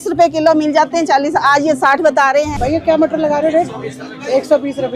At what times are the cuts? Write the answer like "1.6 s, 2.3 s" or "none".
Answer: 2.5 s